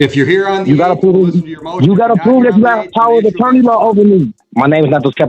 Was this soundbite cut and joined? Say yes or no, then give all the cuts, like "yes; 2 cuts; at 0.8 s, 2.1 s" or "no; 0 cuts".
yes; 1 cut; at 4.4 s